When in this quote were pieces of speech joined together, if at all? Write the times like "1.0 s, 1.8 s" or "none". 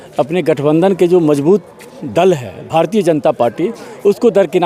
none